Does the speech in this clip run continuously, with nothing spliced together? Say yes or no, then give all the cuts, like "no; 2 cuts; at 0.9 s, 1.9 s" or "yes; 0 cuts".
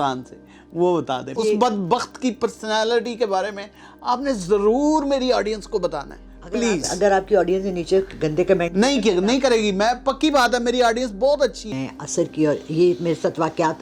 no; 2 cuts; at 1.3 s, 11.8 s